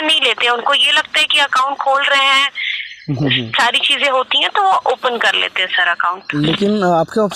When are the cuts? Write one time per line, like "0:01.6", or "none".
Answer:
none